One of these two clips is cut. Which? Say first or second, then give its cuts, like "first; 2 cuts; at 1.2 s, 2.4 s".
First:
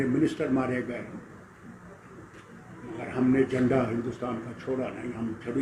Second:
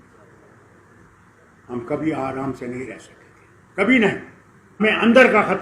second; 1 cut; at 4.6 s